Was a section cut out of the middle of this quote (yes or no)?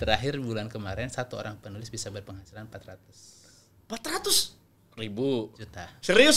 no